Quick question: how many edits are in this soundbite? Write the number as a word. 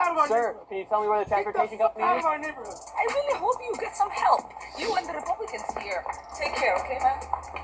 one